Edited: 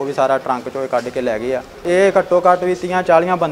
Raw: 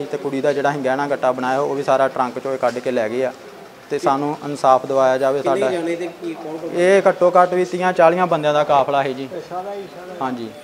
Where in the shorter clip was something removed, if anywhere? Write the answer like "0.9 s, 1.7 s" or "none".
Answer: 1.7 s